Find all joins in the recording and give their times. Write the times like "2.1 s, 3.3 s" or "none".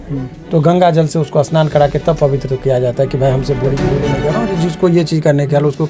4.1 s